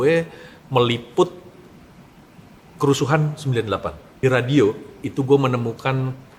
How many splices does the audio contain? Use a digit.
1